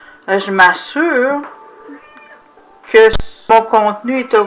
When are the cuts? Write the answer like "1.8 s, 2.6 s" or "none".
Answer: 3.3 s